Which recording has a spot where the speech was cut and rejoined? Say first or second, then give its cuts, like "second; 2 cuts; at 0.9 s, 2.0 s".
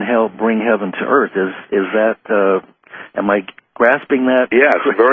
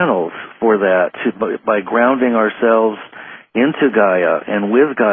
second; 1 cut; at 4.1 s